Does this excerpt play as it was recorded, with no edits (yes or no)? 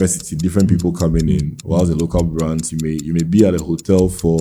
yes